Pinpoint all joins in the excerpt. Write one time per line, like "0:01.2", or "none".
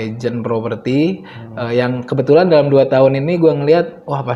none